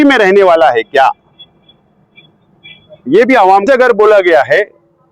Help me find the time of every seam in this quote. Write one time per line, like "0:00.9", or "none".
0:03.7